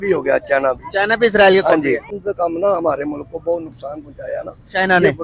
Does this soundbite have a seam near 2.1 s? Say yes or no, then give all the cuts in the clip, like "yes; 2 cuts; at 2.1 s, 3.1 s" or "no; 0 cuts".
yes; 1 cut; at 2.1 s